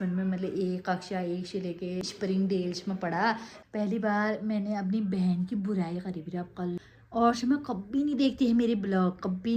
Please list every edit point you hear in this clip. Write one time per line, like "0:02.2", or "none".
0:02.0
0:03.5
0:06.8